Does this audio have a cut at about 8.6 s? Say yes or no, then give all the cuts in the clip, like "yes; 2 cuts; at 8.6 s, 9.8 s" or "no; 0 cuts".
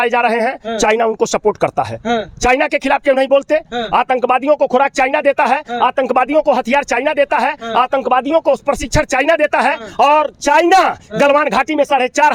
no; 0 cuts